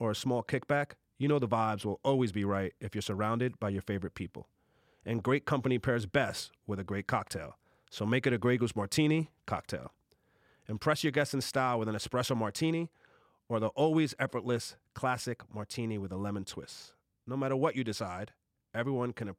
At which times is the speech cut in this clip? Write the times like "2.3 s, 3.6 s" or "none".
none